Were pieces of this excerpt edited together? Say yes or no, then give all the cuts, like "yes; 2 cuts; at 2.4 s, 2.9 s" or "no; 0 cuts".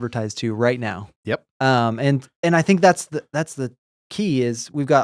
no; 0 cuts